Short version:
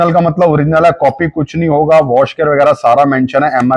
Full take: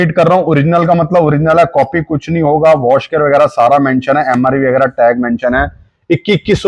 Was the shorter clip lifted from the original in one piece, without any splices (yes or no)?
yes